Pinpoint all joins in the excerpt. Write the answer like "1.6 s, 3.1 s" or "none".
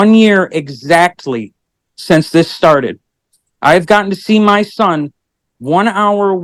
none